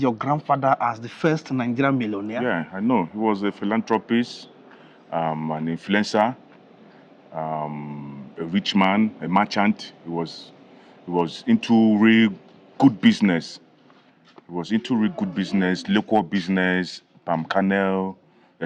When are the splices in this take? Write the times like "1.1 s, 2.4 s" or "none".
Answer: 2.3 s